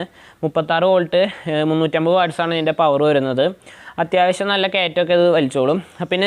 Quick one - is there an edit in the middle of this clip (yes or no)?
no